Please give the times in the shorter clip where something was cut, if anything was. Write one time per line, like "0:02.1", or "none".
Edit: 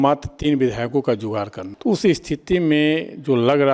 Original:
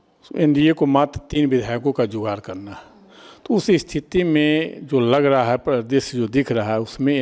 0:01.6